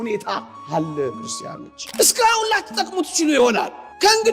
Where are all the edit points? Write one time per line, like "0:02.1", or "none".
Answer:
0:01.8